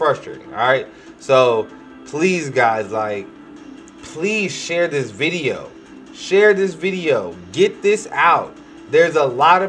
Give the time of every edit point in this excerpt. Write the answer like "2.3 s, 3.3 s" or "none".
none